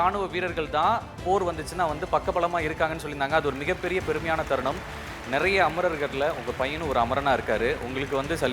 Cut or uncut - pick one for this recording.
cut